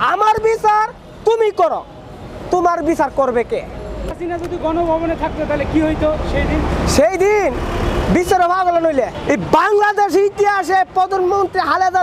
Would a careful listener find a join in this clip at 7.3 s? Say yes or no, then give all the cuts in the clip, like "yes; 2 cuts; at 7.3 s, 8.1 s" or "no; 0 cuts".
no; 2 cuts; at 4.1 s, 9.2 s